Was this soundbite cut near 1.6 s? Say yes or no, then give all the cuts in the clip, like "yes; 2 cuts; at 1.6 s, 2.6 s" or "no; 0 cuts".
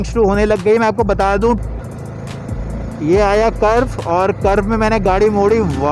yes; 1 cut; at 1.6 s